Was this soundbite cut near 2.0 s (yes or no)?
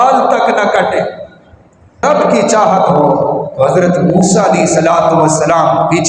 yes